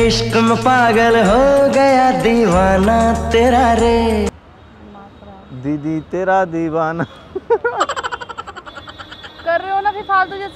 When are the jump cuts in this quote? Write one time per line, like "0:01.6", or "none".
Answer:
none